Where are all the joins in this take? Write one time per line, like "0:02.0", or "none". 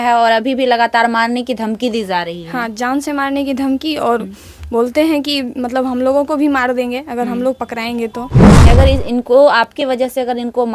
0:08.6